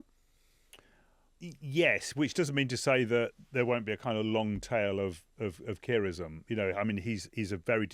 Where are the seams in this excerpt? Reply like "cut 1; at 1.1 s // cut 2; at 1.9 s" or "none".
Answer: cut 1; at 1.2 s